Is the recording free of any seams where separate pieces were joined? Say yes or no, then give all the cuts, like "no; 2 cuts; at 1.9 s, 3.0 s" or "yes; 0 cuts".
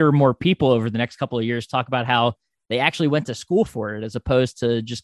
yes; 0 cuts